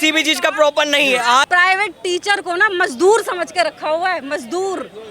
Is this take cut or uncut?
cut